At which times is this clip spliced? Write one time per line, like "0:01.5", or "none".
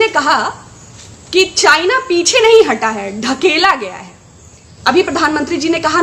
0:04.7